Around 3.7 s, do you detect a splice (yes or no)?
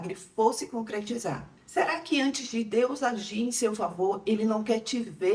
no